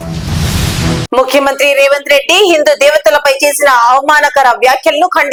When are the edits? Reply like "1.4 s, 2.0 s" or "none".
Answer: none

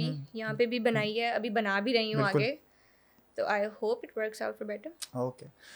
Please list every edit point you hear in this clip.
none

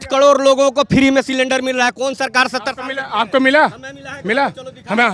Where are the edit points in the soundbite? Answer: none

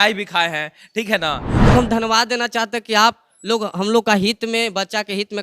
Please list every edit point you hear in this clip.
1.7 s

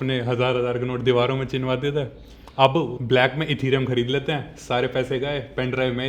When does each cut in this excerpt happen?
3.0 s

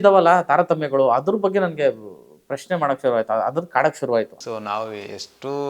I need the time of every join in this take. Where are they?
4.4 s

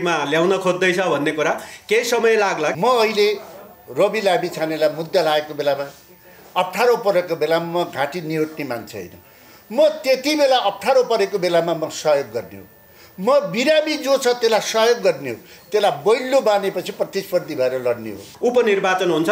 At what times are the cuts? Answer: 2.7 s, 18.3 s

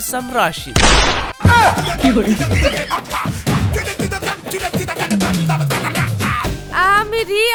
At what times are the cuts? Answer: none

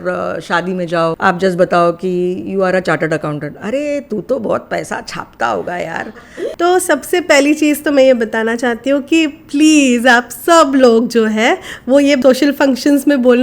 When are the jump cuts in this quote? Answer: 1.2 s, 5.9 s, 12.2 s

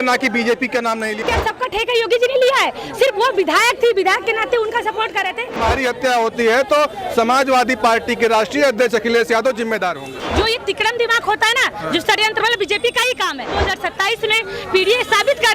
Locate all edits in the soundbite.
1.2 s, 5.6 s, 10.1 s, 13.6 s

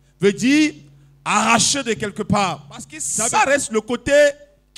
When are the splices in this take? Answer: 3.0 s

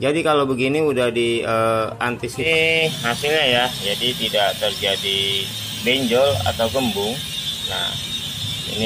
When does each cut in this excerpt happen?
2.4 s

